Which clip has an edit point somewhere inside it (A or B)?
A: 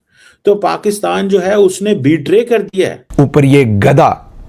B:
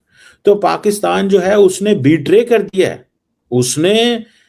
A